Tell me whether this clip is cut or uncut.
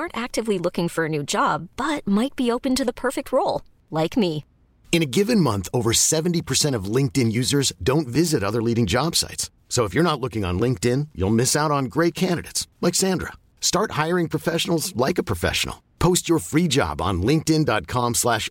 uncut